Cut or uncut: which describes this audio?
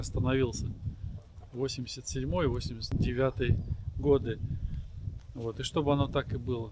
cut